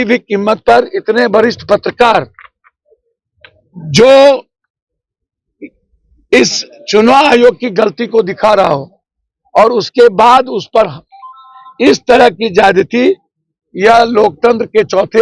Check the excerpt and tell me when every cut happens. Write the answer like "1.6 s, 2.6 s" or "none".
none

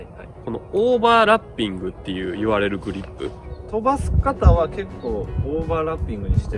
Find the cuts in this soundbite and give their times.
3.5 s

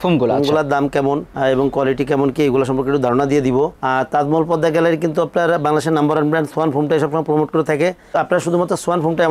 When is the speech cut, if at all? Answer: none

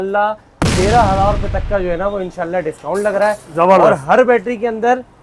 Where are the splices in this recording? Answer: none

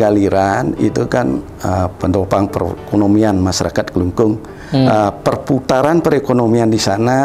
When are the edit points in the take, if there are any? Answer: none

